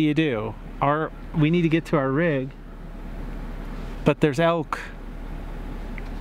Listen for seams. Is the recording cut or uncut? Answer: uncut